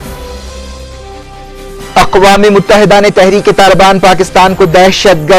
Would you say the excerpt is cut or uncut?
cut